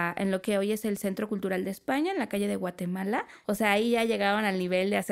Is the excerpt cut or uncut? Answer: cut